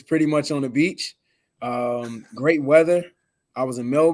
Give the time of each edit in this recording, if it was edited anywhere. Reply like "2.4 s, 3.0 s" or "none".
none